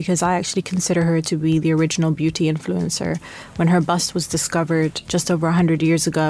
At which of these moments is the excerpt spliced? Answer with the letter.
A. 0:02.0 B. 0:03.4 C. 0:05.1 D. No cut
C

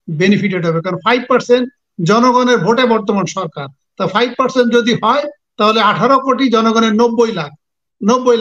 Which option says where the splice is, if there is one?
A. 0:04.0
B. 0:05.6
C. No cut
C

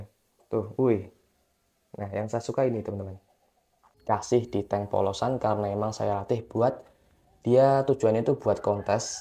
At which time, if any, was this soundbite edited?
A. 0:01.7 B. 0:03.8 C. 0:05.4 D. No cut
B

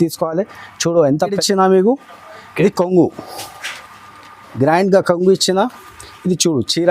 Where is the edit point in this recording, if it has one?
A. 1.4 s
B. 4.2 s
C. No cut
A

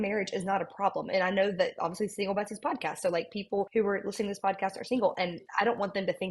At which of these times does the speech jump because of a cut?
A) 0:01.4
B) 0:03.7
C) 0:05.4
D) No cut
B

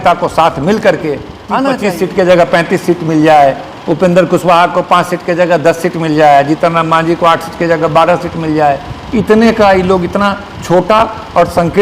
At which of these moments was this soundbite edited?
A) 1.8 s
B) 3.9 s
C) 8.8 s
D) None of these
A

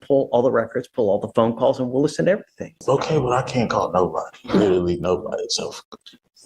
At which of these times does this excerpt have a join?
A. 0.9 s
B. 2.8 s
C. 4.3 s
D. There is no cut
B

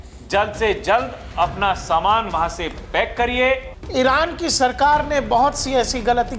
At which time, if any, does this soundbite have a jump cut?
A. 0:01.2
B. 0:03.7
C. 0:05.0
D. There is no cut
B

